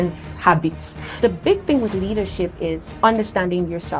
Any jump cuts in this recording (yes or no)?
yes